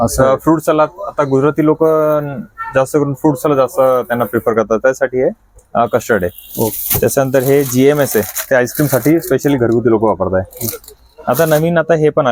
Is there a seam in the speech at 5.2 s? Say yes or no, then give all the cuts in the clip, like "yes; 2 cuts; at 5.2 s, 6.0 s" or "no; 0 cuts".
no; 0 cuts